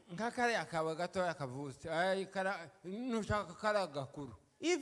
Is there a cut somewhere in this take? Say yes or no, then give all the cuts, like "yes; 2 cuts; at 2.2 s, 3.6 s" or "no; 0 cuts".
no; 0 cuts